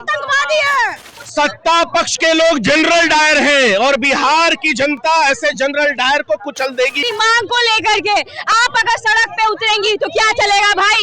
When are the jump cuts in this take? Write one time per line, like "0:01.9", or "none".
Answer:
0:01.2
0:07.0